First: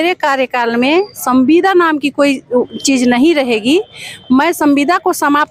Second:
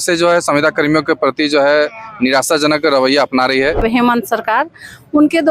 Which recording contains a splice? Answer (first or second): second